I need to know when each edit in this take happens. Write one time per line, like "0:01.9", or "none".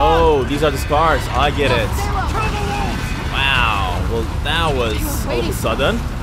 none